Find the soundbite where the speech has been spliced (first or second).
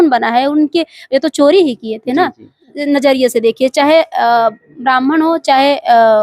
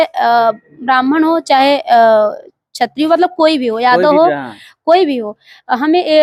first